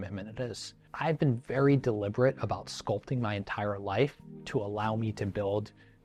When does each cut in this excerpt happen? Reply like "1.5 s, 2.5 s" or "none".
none

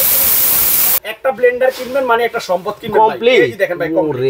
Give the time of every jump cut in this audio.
1.0 s

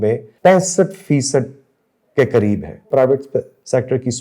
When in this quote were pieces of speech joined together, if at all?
2.8 s

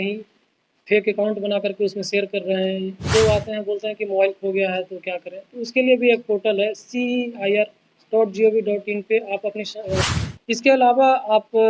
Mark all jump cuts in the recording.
3.1 s, 10.0 s

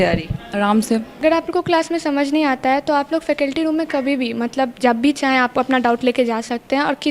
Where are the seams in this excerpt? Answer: 1.2 s

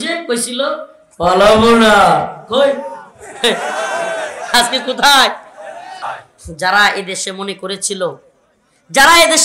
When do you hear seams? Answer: 6.2 s

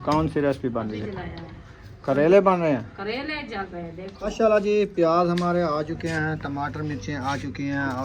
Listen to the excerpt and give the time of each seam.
4.2 s

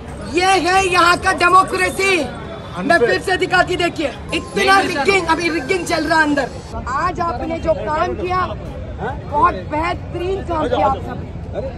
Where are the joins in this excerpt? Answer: 4.2 s, 6.8 s

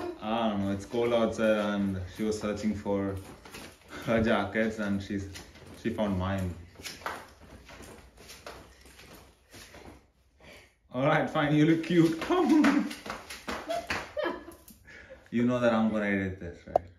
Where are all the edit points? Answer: none

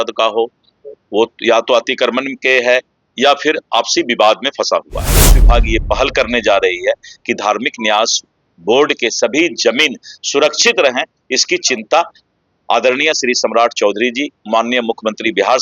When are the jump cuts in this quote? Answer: 5.4 s

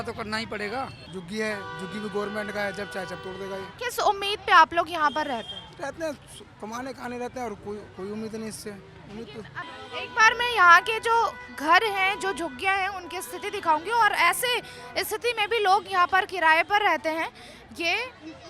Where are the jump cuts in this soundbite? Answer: 1.1 s, 3.7 s, 9.6 s

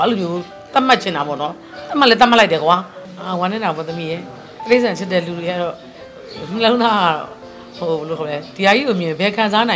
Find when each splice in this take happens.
3.0 s

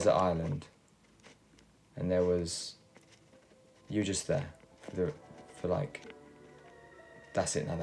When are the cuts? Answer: none

